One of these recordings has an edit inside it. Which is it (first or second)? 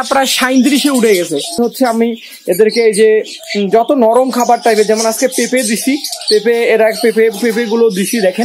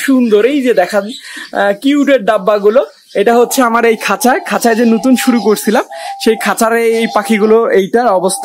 first